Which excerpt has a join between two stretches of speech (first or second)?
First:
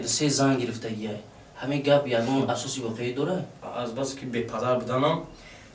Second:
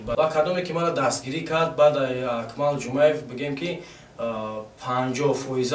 first